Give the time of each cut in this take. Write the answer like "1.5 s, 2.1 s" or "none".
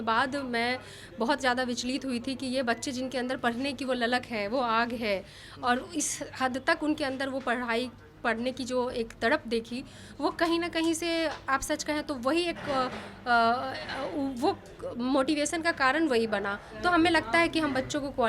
16.6 s